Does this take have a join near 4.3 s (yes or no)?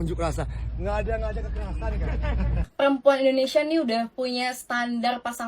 no